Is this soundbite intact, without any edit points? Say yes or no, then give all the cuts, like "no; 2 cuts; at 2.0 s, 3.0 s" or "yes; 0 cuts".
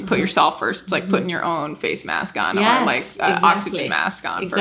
yes; 0 cuts